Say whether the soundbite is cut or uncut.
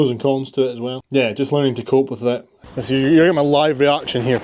cut